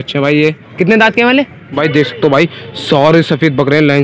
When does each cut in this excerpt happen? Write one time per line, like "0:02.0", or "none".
0:01.8